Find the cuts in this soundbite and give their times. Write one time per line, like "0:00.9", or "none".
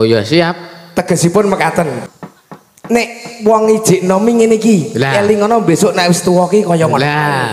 0:02.0